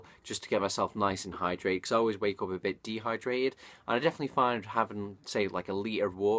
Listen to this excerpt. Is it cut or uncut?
cut